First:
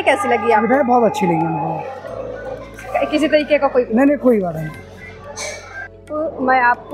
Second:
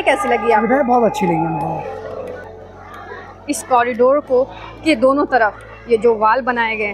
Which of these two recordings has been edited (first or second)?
second